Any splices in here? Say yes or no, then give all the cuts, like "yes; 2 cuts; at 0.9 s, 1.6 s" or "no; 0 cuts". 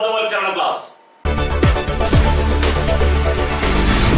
no; 0 cuts